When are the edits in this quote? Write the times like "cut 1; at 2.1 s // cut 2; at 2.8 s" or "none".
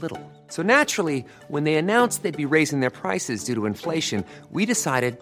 none